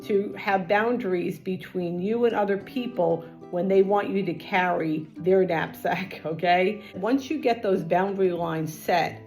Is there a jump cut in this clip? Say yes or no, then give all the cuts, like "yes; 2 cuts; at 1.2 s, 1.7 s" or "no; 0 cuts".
yes; 1 cut; at 7.0 s